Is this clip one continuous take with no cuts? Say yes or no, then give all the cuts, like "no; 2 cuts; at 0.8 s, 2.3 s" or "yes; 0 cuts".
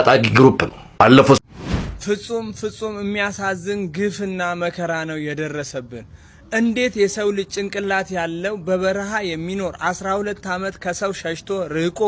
no; 1 cut; at 1.4 s